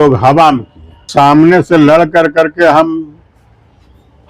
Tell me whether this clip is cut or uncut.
cut